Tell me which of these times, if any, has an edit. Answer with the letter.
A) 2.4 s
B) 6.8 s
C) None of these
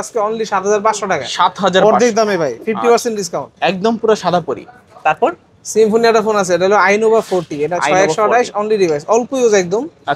C